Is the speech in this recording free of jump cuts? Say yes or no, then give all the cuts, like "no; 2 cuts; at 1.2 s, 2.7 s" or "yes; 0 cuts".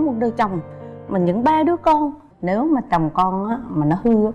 no; 1 cut; at 2.3 s